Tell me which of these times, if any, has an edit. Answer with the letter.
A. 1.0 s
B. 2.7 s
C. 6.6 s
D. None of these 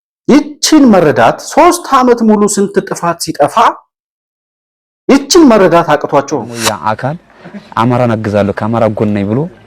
C